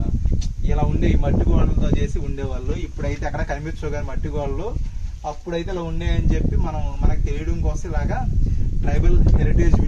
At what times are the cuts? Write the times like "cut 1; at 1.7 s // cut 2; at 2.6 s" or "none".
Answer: none